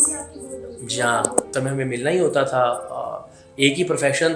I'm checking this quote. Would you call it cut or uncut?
cut